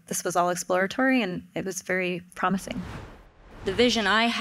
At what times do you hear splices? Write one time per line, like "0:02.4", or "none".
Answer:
0:03.4